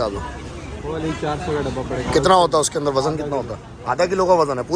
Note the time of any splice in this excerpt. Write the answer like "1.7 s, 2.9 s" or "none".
none